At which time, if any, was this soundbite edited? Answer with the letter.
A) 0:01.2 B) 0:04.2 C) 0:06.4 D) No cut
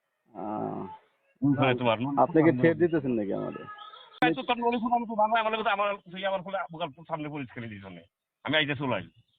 B